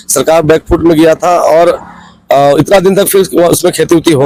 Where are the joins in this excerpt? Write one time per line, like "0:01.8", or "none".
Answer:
none

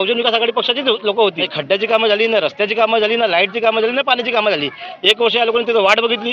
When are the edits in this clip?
0:01.5

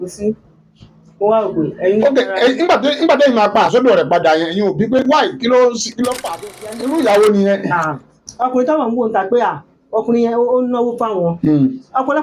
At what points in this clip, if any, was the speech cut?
0:06.5

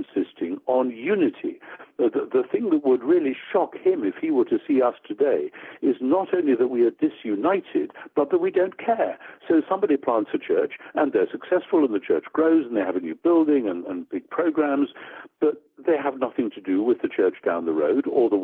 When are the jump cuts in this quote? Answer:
none

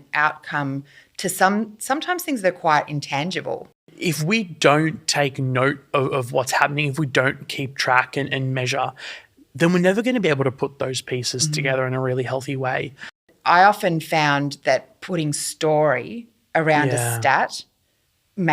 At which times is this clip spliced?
0:03.8
0:13.3

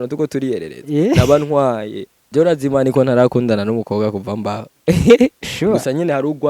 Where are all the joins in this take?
0:02.1

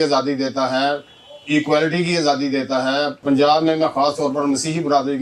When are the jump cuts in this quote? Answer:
0:03.2

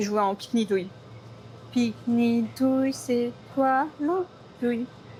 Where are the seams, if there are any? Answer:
none

